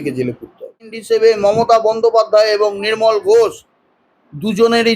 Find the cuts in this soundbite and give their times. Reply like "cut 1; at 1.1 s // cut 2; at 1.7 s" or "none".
cut 1; at 1.0 s